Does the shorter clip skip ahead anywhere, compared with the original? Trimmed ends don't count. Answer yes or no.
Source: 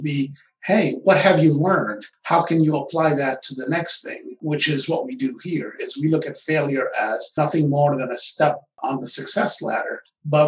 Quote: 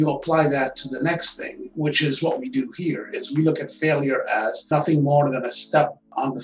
no